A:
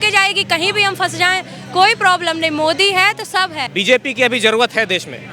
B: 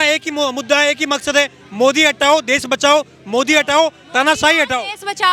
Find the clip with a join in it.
A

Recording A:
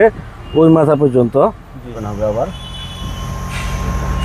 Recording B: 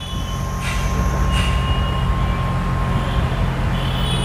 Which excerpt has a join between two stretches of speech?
A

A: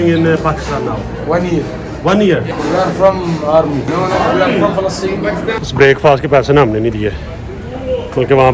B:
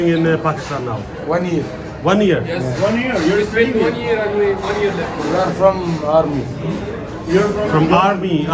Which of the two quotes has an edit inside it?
A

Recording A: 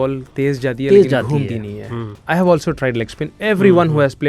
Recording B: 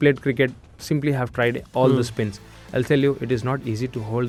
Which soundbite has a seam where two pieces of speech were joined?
A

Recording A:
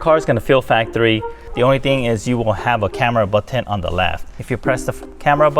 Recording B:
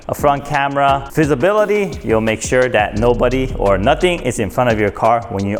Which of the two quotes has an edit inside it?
A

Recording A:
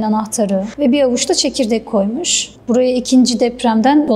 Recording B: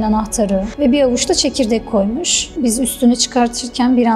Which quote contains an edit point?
B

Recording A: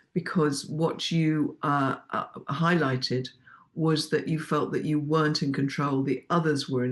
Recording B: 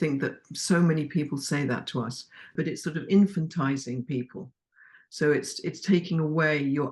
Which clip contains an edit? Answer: B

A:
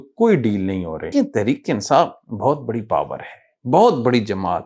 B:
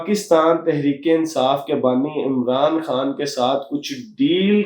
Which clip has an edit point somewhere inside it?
A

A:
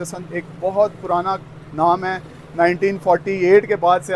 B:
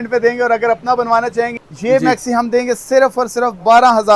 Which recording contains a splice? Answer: B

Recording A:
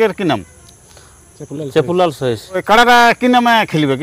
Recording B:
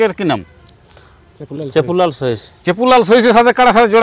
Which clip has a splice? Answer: A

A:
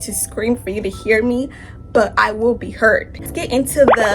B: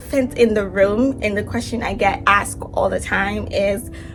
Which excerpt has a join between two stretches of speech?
A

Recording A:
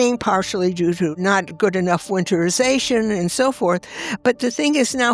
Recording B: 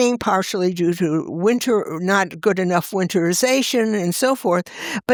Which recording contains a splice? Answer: A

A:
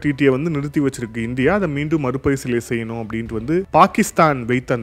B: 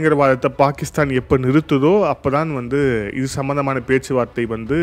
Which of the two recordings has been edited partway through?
A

